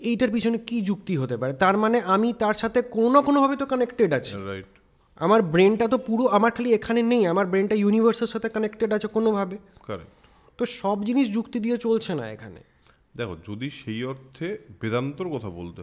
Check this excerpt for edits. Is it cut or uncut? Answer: uncut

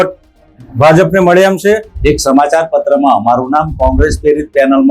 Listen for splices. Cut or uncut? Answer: cut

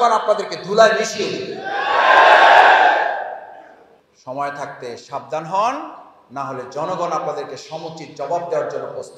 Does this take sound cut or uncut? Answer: uncut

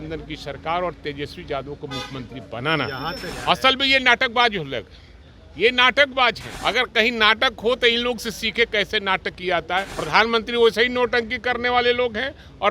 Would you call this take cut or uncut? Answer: cut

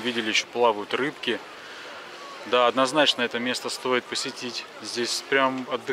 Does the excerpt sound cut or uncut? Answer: uncut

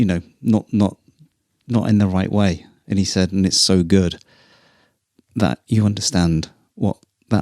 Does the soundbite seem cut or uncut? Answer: uncut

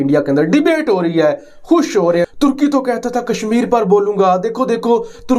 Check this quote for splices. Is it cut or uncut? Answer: uncut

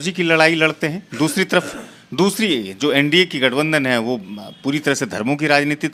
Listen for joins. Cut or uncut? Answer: uncut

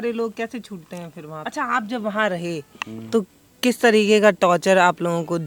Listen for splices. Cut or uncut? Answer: cut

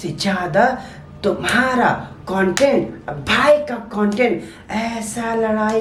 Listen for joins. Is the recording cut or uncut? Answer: uncut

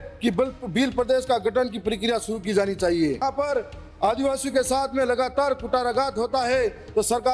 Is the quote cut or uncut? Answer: cut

